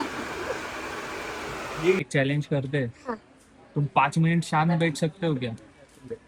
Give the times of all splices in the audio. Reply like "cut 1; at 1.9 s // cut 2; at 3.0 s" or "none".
cut 1; at 2.0 s